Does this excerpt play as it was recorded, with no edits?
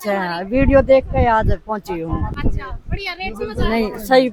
yes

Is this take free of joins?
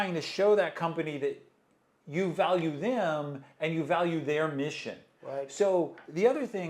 yes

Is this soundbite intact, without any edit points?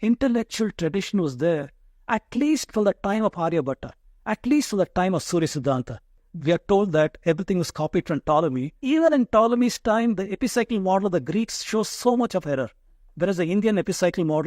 no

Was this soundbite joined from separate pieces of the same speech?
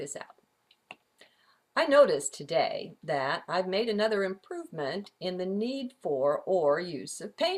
yes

